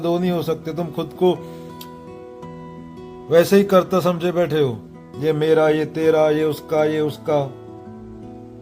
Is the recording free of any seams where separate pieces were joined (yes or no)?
no